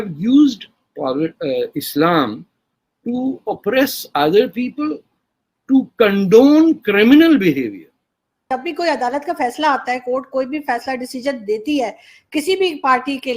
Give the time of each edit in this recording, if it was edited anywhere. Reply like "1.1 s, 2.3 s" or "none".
8.5 s